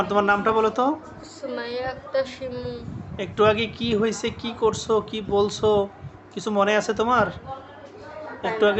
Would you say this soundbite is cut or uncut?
uncut